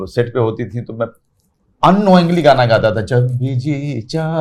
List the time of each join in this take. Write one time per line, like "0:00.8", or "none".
none